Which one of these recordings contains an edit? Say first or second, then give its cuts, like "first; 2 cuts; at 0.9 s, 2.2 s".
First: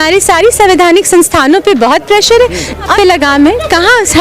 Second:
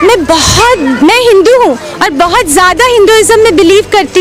first; 1 cut; at 2.9 s